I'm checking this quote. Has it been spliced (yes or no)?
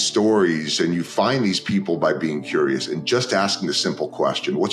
no